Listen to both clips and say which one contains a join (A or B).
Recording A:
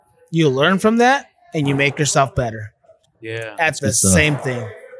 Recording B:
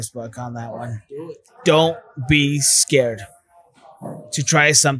B